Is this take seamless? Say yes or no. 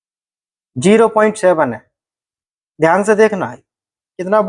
yes